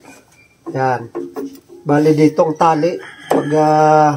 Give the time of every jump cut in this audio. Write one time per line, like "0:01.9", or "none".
0:01.7